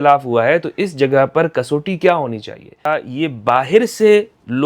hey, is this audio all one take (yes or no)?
no